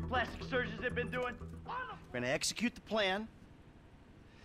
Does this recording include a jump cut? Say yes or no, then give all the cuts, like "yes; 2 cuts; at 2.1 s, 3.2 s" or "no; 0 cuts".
yes; 1 cut; at 1.5 s